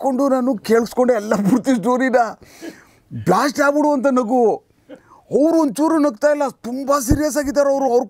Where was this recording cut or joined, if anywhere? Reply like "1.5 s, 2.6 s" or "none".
none